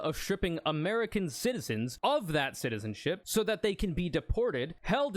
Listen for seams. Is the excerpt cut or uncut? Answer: cut